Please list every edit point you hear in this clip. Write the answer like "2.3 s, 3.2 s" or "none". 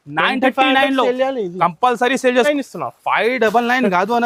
2.5 s